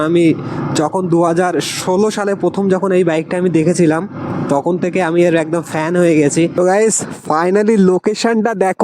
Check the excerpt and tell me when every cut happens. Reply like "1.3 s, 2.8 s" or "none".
6.6 s

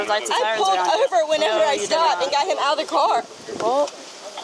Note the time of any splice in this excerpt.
none

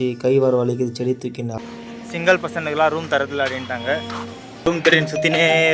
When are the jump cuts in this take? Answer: 1.6 s, 4.7 s

